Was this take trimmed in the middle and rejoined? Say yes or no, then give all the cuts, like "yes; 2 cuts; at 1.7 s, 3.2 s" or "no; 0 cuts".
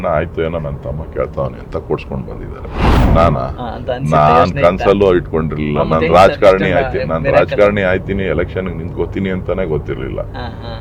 yes; 1 cut; at 2.8 s